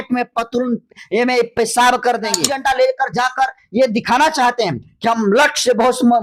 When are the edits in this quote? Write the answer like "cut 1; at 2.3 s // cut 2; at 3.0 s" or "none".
cut 1; at 2.5 s